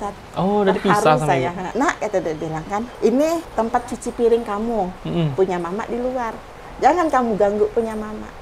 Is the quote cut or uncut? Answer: cut